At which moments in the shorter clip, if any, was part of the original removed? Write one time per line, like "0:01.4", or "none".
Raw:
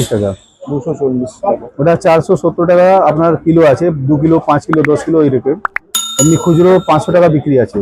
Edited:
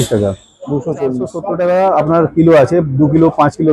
0:01.4